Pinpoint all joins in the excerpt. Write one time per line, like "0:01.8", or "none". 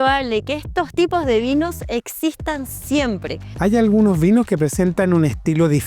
0:00.9
0:03.6

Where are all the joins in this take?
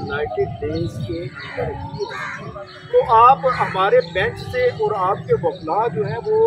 0:02.7

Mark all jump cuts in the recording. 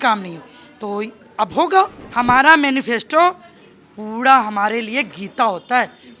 0:02.0

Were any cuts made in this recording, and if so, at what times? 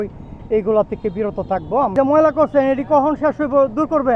0:01.9

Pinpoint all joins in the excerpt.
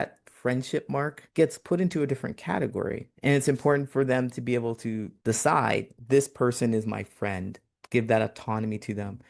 0:03.1
0:05.1
0:05.9

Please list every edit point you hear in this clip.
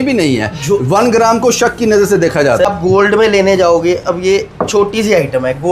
0:02.6

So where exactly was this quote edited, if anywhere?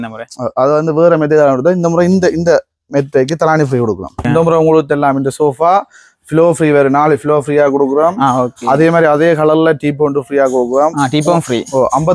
0:04.3

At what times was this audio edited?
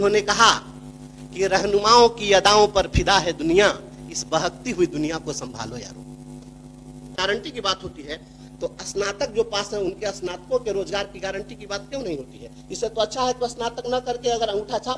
0:07.2

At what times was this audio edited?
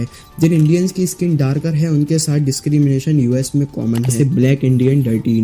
0:04.1

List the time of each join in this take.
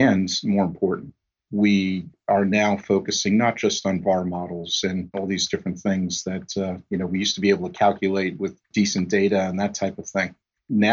0:05.2
0:08.7

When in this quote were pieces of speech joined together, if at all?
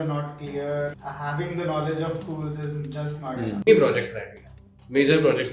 0:01.0
0:03.7

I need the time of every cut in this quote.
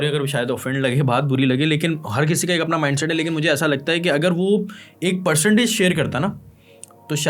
none

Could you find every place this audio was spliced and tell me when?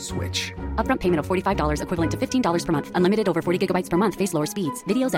none

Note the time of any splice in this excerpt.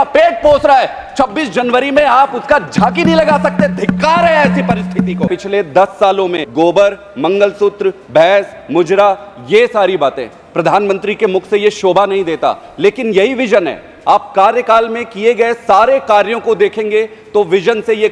0:05.3
0:06.4

